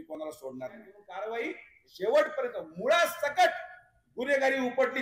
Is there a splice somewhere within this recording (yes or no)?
yes